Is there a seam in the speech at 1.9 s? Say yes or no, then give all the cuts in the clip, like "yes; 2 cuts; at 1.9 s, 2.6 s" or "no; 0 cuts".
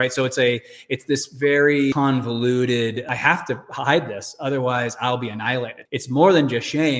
yes; 3 cuts; at 1.9 s, 3.1 s, 5.8 s